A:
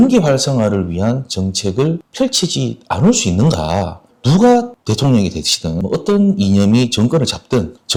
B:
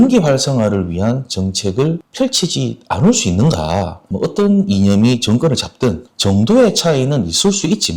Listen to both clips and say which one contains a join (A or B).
B